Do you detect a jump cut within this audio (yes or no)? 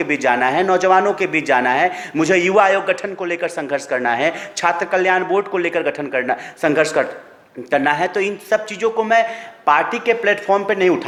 no